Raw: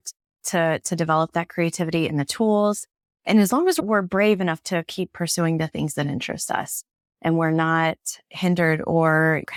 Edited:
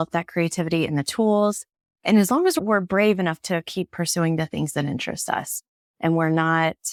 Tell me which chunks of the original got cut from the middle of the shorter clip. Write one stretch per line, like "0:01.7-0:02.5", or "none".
none